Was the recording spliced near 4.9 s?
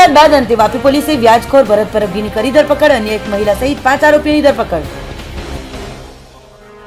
no; 0 cuts

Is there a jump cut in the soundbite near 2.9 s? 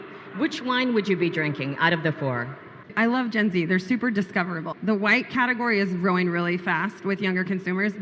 yes; 2 cuts; at 2.9 s, 4.6 s

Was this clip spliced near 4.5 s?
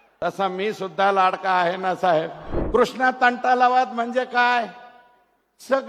no; 1 cut; at 2.6 s

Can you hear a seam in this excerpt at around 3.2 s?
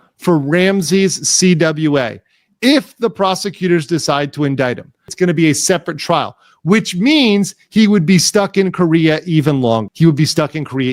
no; 2 cuts; at 5.0 s, 9.9 s

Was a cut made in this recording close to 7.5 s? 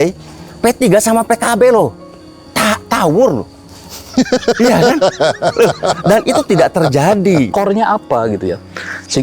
yes; 1 cut; at 7.5 s

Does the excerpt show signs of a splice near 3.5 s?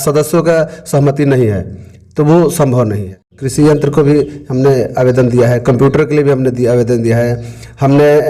yes; 1 cut; at 3.5 s

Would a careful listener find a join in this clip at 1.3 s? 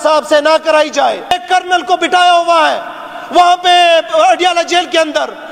yes; 1 cut; at 1.3 s

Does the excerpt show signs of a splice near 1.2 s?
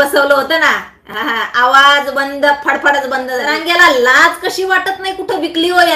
no; 1 cut; at 3.5 s

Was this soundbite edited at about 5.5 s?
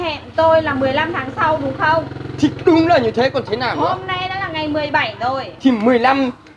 yes; 1 cut; at 5.5 s

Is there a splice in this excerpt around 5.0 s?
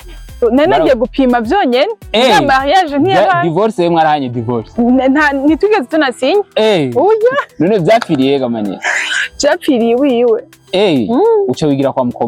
no; 0 cuts

